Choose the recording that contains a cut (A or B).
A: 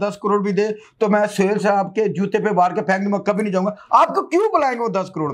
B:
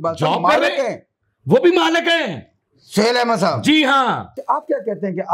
B